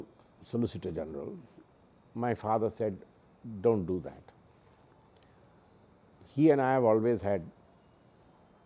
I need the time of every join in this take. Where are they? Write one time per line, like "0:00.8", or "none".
none